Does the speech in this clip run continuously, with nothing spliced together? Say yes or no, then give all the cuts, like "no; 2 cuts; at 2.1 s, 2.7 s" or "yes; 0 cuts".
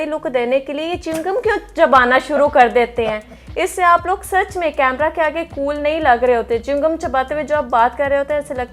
yes; 0 cuts